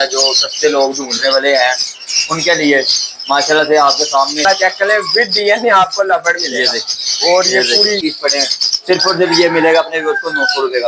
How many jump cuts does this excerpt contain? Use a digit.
2